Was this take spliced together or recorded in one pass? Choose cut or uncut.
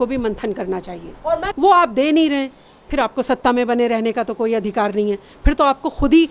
cut